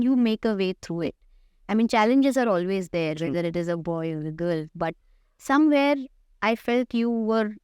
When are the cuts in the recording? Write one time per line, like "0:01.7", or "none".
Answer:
none